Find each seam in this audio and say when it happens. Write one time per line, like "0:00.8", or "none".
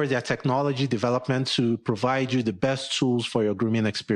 none